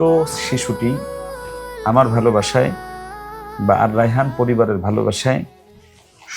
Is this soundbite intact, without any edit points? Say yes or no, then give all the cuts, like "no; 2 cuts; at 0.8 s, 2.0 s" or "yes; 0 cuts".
yes; 0 cuts